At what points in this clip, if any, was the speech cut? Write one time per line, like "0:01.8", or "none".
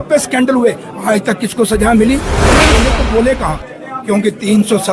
0:02.6

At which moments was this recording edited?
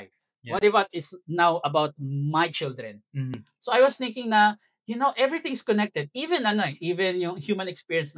0:03.4

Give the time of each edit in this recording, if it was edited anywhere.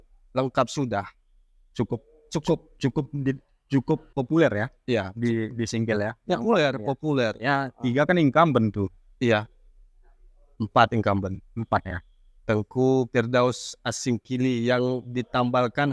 none

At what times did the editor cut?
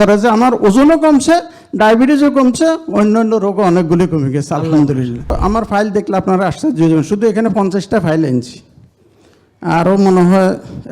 0:05.4

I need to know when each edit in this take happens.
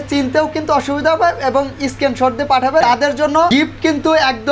0:03.1

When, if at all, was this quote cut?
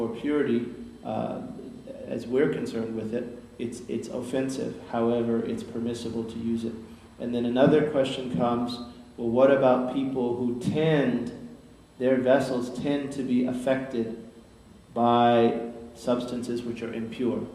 0:14.3

